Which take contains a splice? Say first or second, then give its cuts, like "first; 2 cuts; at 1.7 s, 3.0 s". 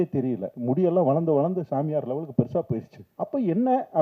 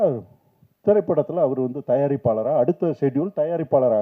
first; 1 cut; at 3.0 s